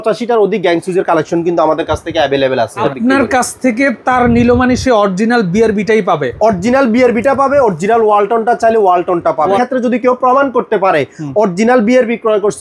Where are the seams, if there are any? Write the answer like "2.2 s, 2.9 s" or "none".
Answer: 2.8 s, 9.6 s